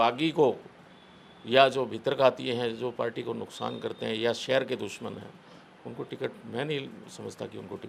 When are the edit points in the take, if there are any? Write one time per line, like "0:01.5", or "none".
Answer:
none